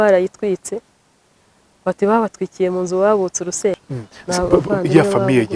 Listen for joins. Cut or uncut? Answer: cut